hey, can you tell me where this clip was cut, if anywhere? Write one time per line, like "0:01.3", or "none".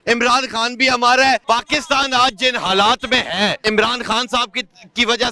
0:01.4
0:03.6